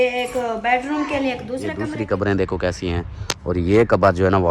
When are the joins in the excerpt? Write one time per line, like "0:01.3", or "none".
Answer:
0:01.8